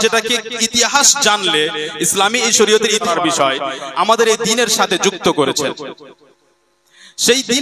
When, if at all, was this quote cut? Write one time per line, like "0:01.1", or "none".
0:03.1